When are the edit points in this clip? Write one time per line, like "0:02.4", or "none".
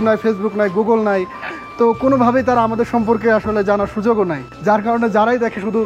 0:04.5